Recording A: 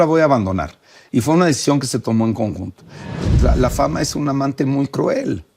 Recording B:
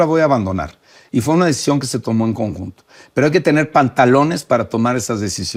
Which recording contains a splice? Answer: A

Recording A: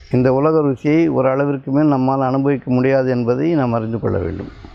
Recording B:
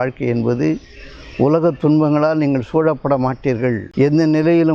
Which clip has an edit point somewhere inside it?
B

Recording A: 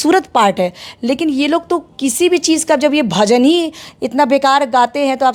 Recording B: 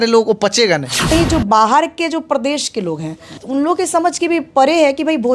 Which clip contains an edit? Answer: B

